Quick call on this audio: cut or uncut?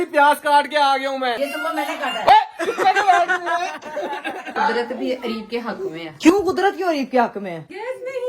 cut